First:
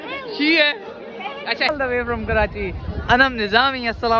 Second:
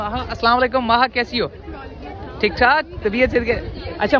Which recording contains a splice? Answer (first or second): first